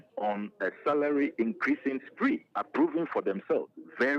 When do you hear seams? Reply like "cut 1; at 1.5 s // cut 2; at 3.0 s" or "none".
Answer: none